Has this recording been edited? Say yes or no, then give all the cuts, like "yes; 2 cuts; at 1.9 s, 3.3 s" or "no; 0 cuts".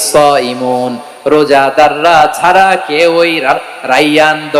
no; 0 cuts